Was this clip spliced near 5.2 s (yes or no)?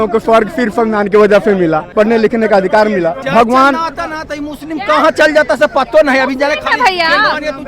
no